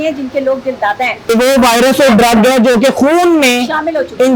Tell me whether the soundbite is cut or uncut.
cut